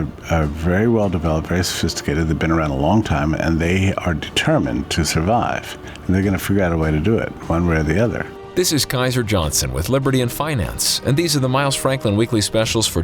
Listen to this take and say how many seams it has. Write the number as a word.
one